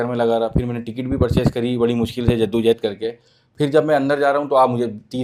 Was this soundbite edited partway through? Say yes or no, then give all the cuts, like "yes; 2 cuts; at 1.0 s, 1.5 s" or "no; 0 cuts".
no; 0 cuts